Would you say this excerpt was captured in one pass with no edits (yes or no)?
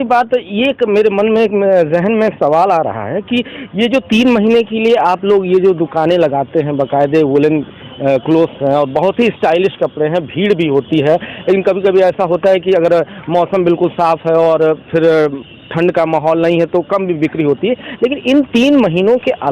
yes